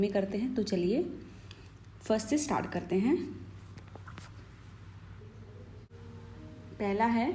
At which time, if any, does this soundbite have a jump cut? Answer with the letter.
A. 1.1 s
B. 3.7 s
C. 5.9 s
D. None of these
C